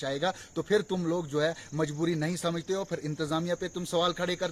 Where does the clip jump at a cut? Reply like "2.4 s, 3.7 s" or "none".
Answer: none